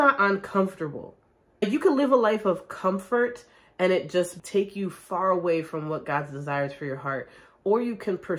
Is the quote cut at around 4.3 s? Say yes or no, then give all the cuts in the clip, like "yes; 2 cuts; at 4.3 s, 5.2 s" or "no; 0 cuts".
yes; 2 cuts; at 1.6 s, 4.3 s